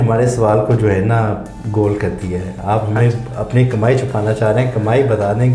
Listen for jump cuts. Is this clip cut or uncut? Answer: uncut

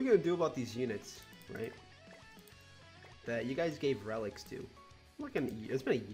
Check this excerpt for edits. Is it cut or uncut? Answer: cut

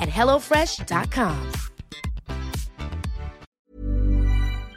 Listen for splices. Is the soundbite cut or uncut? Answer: cut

